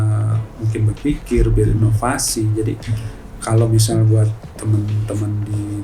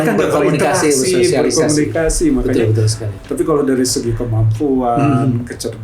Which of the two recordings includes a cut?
second; 1 cut; at 3.1 s

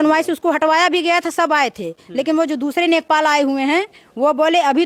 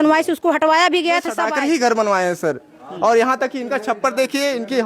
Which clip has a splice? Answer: second; 1 cut; at 1.4 s

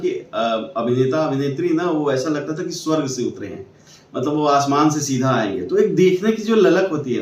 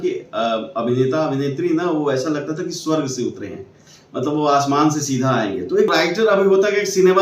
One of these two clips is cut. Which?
second; 1 cut; at 5.9 s

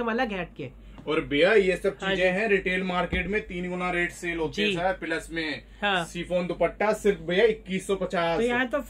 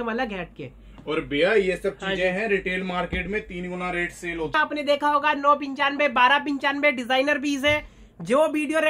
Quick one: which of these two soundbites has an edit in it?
second; 1 cut; at 4.5 s

